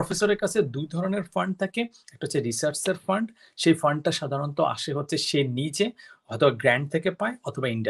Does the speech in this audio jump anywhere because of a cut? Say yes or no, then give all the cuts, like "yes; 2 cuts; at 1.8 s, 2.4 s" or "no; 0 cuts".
no; 0 cuts